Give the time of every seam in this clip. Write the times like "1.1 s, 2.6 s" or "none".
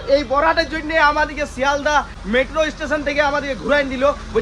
none